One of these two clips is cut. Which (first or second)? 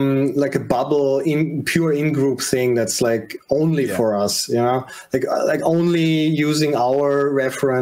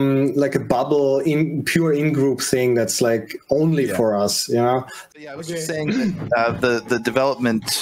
second